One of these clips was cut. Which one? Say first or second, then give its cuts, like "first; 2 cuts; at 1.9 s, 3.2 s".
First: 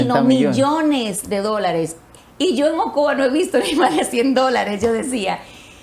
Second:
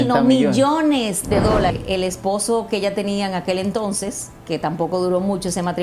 second; 1 cut; at 1.7 s